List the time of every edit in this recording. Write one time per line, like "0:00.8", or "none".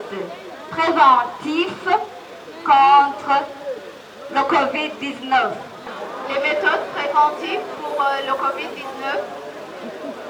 0:05.9

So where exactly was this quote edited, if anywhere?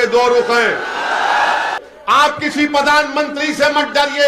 0:01.7

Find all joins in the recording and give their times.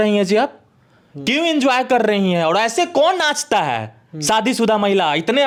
none

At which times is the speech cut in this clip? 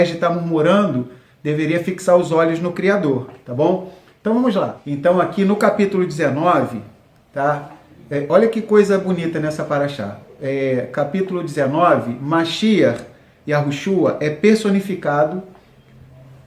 0:04.8

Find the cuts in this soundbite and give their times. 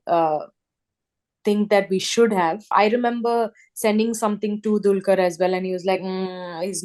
0:02.7

